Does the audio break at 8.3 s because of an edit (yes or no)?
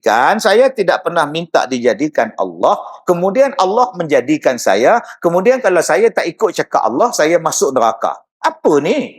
yes